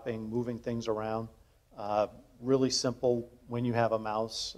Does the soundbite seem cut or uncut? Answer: uncut